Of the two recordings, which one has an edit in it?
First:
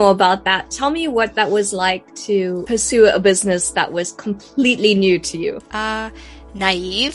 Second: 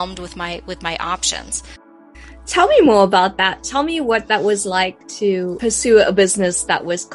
second; 1 cut; at 1.8 s

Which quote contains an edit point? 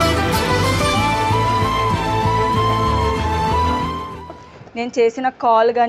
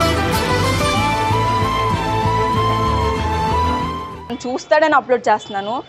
second; 1 cut; at 4.4 s

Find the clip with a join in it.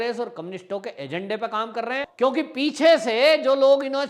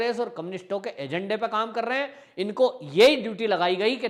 first; 1 cut; at 2.0 s

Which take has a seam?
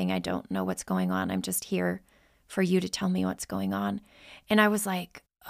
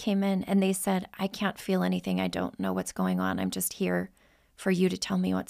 second; 1 cut; at 1.1 s

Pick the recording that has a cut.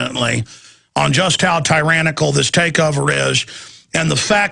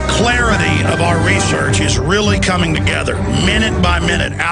first; 1 cut; at 2.1 s

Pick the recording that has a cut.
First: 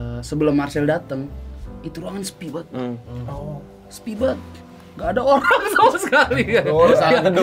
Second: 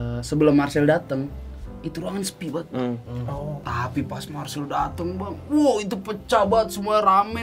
second; 1 cut; at 3.6 s

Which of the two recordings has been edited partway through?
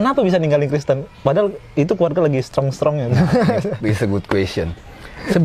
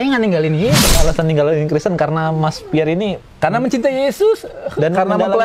second; 1 cut; at 1.0 s

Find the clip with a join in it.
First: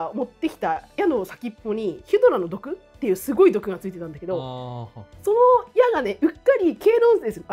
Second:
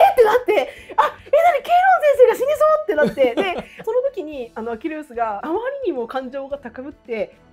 second; 2 cuts; at 3.7 s, 5.4 s

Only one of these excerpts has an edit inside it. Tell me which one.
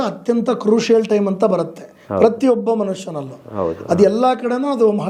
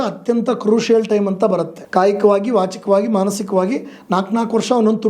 second; 1 cut; at 1.8 s

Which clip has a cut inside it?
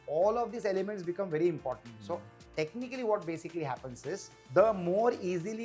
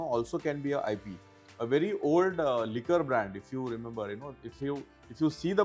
first; 1 cut; at 4.3 s

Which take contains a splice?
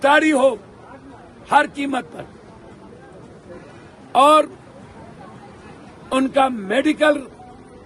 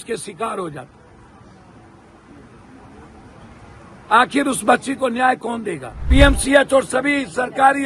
second; 1 cut; at 6.1 s

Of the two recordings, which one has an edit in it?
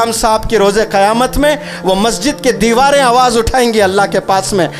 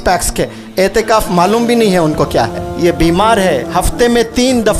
second; 1 cut; at 2.6 s

